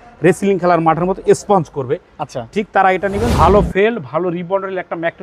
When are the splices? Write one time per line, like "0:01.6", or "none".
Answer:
0:03.2